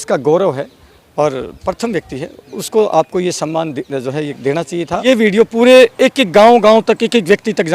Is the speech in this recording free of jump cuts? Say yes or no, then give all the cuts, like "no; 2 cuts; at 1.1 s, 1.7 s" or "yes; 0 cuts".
no; 1 cut; at 5.0 s